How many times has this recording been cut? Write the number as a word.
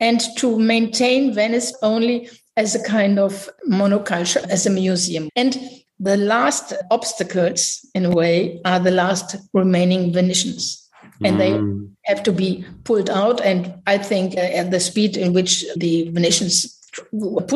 two